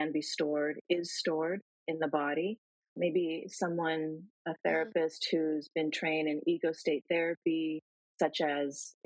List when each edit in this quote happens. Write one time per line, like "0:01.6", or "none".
0:02.9